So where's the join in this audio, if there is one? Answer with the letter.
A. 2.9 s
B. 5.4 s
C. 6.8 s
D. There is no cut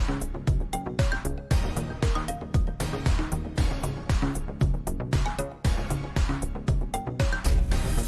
A